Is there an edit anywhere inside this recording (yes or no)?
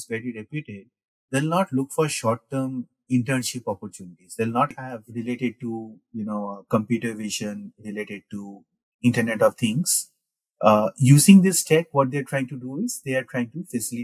yes